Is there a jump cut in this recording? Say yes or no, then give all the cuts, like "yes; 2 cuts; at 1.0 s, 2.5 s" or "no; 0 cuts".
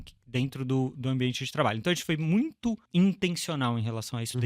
yes; 1 cut; at 2.8 s